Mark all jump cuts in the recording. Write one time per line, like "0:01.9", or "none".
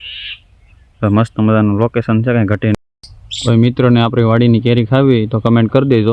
0:02.8